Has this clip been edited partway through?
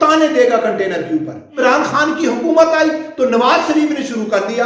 yes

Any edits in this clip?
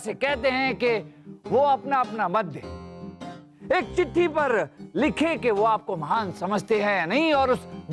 no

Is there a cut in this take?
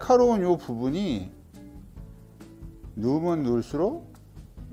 no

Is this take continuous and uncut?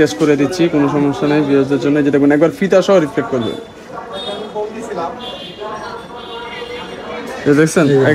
yes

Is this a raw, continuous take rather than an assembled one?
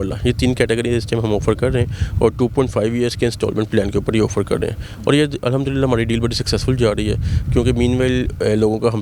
yes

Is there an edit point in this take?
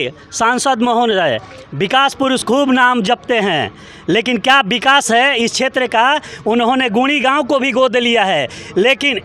no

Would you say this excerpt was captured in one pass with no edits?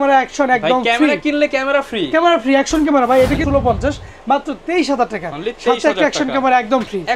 no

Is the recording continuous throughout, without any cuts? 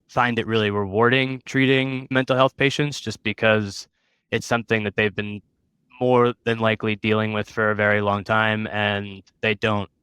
no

